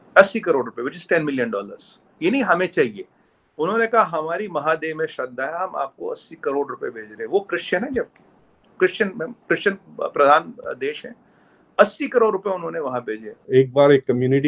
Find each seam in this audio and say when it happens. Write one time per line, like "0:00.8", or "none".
0:13.3